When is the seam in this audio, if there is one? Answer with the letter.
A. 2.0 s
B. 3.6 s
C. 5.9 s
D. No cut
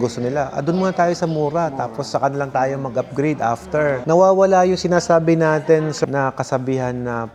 D